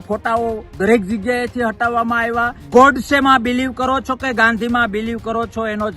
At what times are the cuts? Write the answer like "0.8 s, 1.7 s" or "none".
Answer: 2.6 s